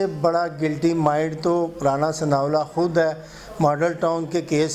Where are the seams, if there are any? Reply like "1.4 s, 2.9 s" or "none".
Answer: none